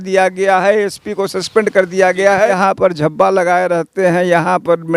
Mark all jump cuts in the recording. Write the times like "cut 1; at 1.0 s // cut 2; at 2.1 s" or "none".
cut 1; at 2.5 s